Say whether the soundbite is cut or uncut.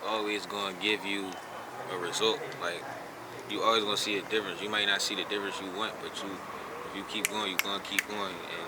uncut